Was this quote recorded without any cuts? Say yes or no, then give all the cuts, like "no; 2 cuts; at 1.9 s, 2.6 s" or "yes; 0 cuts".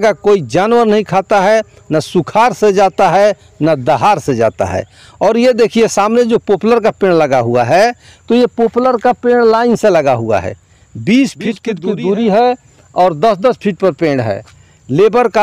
no; 1 cut; at 11.7 s